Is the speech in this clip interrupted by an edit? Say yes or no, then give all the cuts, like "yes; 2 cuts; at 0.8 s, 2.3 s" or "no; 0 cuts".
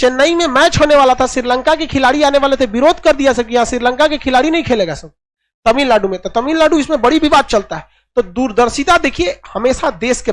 no; 0 cuts